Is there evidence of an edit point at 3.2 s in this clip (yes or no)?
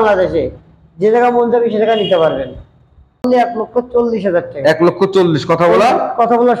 yes